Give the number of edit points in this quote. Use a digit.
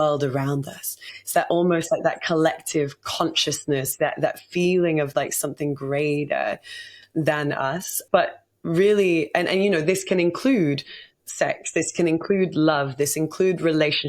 1